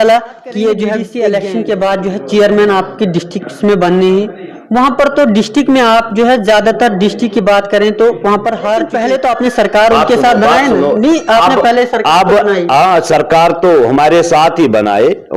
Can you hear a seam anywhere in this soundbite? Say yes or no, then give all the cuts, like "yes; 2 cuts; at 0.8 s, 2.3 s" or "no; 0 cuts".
yes; 2 cuts; at 1.0 s, 8.9 s